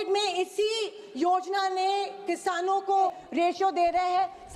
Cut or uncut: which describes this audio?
cut